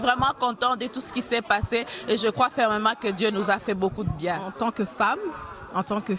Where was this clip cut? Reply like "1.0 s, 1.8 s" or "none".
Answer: 4.4 s